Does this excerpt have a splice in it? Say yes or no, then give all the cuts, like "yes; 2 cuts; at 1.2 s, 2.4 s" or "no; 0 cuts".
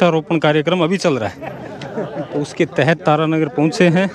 no; 0 cuts